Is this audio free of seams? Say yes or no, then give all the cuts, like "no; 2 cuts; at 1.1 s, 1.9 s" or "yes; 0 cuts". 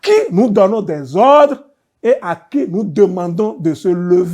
yes; 0 cuts